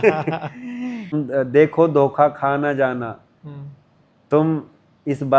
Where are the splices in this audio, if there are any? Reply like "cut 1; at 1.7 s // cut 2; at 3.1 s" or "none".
cut 1; at 1.1 s